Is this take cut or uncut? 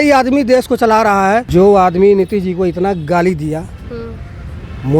cut